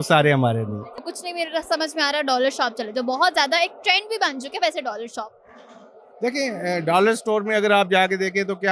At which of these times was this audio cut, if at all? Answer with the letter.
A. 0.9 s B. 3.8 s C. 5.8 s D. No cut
A